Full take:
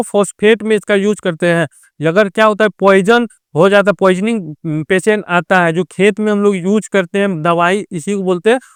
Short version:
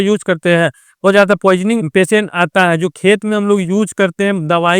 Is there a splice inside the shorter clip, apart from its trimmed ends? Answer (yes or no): yes